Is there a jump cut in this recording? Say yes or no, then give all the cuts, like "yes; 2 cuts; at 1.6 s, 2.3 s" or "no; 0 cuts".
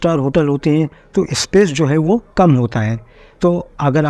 no; 0 cuts